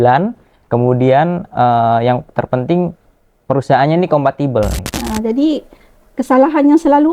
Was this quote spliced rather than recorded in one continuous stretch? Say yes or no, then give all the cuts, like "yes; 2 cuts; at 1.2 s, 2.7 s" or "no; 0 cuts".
yes; 1 cut; at 4.8 s